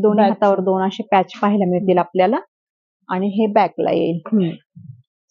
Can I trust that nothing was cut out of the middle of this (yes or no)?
yes